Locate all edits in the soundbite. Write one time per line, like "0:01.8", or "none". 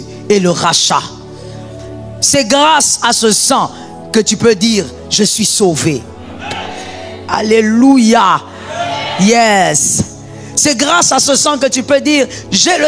none